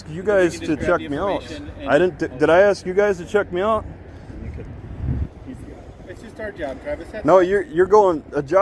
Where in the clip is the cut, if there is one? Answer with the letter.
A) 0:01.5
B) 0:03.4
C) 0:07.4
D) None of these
A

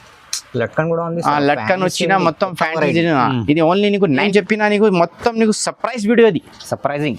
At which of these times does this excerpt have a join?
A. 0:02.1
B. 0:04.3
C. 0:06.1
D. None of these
B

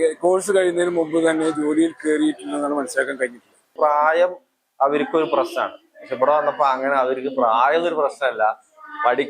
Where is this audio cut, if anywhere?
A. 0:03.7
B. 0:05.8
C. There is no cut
A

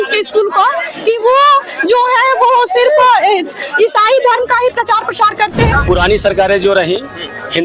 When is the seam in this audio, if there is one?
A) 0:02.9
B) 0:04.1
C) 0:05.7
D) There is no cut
C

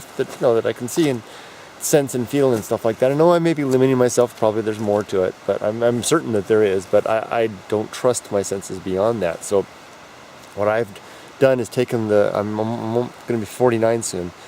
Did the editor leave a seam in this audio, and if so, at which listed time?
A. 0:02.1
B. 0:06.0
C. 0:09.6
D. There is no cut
B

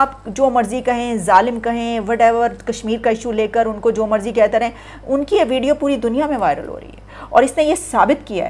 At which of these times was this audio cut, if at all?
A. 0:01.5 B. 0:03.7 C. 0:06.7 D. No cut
D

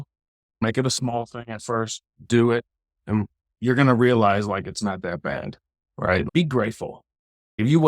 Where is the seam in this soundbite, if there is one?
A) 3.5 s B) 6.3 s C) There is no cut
B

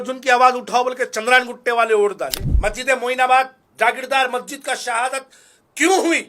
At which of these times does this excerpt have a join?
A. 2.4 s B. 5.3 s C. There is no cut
A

